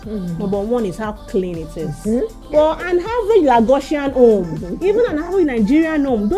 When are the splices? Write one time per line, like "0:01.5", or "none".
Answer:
0:02.4